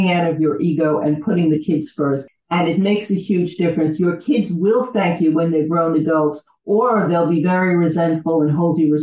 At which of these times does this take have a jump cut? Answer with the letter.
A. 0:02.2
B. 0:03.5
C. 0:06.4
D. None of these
A